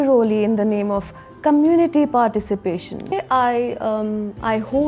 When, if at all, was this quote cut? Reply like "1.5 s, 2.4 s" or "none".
3.1 s